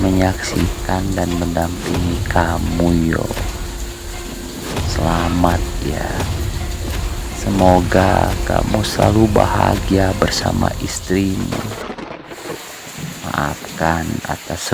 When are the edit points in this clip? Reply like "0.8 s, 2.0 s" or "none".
11.6 s, 13.3 s